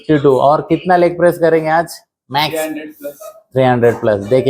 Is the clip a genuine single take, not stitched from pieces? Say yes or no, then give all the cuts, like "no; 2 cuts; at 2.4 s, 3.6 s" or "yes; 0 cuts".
yes; 0 cuts